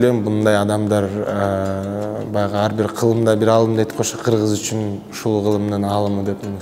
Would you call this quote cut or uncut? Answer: uncut